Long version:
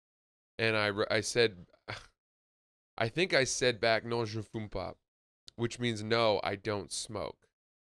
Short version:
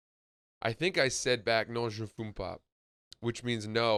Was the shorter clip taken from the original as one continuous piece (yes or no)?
yes